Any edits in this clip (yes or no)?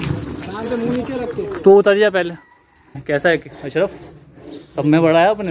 yes